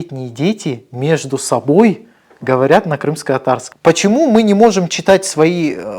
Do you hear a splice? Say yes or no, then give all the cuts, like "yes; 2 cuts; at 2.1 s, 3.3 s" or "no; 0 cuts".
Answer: yes; 1 cut; at 3.6 s